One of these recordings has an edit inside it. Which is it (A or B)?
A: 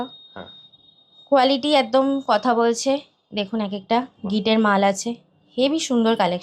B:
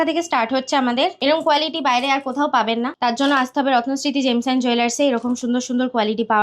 B